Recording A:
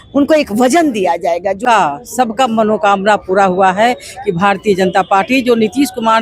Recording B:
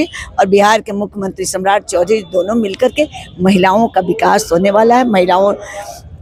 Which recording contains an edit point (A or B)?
A